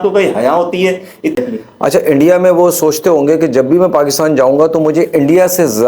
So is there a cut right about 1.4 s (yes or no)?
yes